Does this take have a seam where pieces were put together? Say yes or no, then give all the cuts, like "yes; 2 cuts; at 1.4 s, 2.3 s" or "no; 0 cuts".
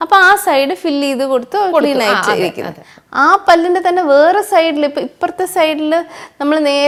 no; 0 cuts